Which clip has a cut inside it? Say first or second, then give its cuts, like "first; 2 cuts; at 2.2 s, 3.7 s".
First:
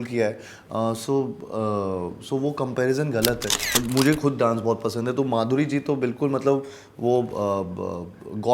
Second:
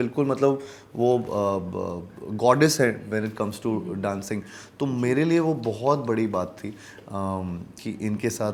first; 1 cut; at 3.8 s